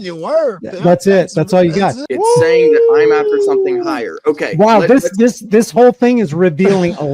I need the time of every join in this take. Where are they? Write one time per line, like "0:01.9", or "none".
0:02.0